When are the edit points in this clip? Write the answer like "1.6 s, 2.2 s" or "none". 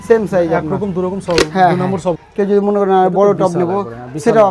2.2 s

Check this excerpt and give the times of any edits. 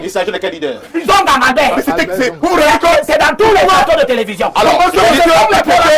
none

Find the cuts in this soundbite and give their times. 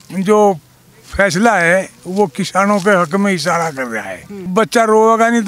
4.5 s

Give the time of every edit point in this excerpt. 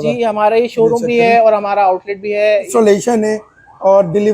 2.7 s

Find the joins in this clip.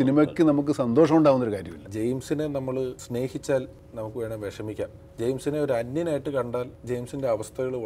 1.8 s, 3.0 s, 3.8 s, 5.0 s

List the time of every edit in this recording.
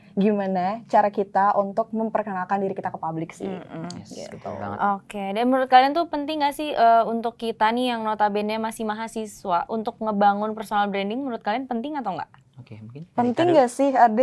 none

